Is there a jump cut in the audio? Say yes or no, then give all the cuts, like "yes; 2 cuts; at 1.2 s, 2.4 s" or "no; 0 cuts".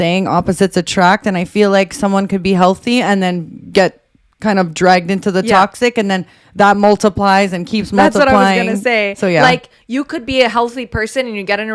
no; 0 cuts